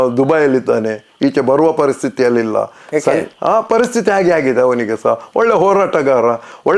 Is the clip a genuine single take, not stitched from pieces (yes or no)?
yes